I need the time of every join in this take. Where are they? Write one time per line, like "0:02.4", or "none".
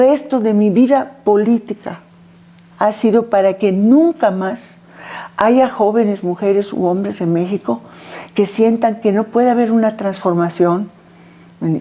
none